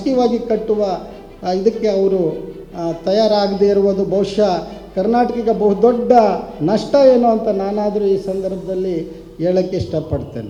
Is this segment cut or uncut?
uncut